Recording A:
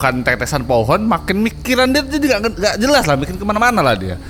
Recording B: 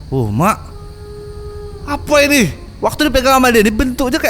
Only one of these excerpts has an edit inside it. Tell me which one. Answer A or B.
B